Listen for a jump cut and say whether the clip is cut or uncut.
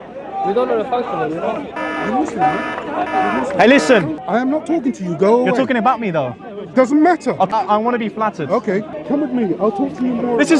cut